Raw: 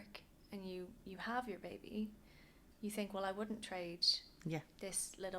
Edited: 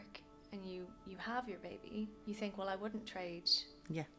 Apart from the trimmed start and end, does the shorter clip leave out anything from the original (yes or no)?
yes